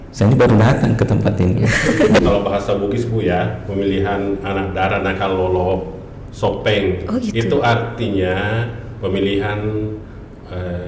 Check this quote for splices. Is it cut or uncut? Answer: cut